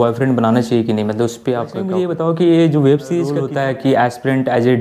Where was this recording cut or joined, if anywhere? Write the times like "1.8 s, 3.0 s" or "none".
1.9 s, 3.4 s